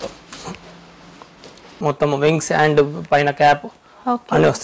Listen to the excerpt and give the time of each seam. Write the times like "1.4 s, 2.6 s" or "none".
1.7 s